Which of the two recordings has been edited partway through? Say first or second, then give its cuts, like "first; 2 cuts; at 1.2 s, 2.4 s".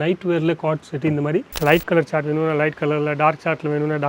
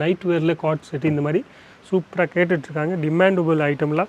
first; 1 cut; at 1.5 s